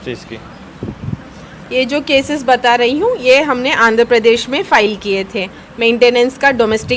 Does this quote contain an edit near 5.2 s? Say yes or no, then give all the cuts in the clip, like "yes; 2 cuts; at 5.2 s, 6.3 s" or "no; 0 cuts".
no; 0 cuts